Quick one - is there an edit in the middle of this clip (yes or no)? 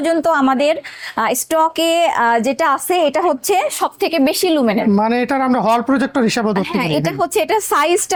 no